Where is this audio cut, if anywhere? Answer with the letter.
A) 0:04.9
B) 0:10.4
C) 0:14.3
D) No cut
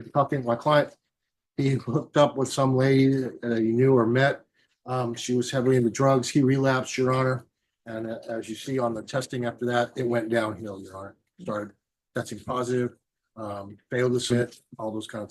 C